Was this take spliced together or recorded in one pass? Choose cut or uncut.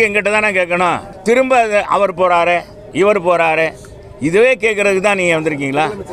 cut